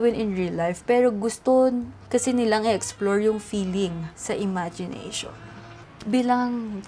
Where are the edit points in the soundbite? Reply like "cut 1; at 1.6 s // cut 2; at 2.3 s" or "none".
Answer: cut 1; at 1.5 s // cut 2; at 4.1 s // cut 3; at 5.7 s